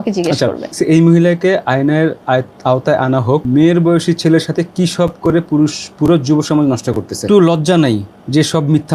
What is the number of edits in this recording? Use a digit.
3